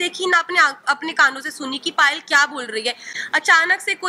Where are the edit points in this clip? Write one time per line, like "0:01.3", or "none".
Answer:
0:03.1